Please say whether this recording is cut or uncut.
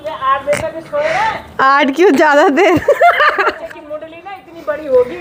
uncut